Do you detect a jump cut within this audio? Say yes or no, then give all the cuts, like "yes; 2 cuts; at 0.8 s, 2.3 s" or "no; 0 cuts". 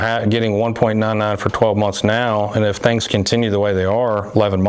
no; 0 cuts